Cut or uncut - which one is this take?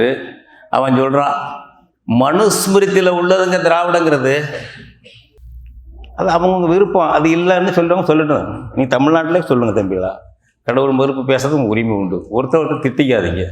cut